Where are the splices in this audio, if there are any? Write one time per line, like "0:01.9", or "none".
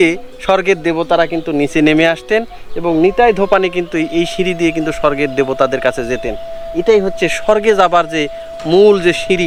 none